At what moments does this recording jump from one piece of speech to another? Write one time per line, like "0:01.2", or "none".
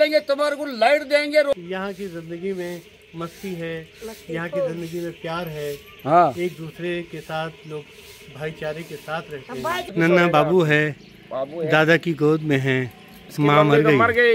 0:01.5
0:09.9